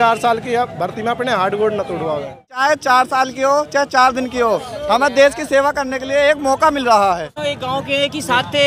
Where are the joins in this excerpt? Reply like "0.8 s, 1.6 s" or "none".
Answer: 2.6 s, 7.3 s